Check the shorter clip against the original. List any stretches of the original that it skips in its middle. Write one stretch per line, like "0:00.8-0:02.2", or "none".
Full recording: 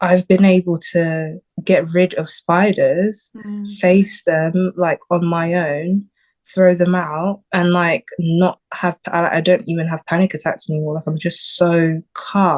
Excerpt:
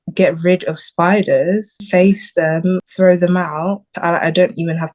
0:03.3-0:03.7
0:04.7-0:06.4
0:07.5-0:09.0